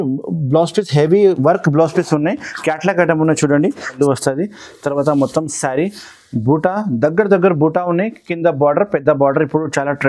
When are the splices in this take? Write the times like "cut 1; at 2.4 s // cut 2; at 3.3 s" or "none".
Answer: cut 1; at 3.9 s